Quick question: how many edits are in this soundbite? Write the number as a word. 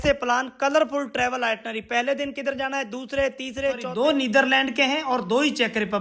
one